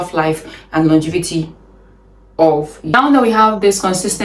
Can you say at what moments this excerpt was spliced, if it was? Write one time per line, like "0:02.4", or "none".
0:02.9